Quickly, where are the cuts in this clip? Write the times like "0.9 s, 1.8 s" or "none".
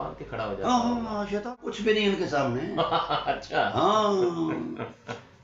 1.6 s